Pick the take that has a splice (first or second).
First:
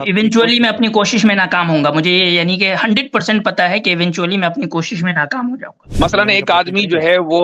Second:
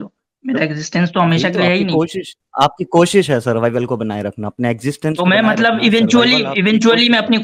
first